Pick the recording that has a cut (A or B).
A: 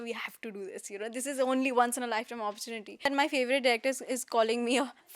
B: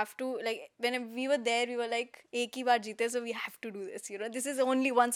A